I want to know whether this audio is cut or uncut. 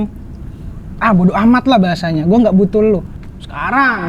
uncut